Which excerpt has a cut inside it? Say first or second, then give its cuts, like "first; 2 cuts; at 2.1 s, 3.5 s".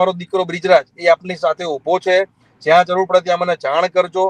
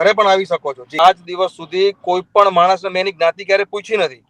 second; 1 cut; at 0.9 s